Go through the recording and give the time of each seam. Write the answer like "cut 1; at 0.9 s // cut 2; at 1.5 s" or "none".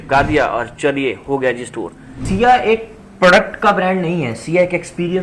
cut 1; at 2.2 s